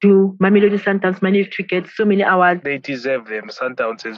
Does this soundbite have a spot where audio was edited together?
yes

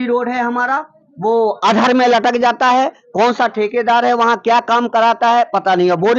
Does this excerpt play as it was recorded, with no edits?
yes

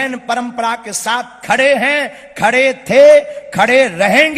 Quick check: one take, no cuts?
yes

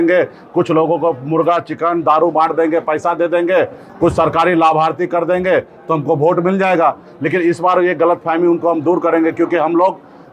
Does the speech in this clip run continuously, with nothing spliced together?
yes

